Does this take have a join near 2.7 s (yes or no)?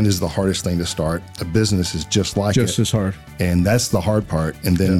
no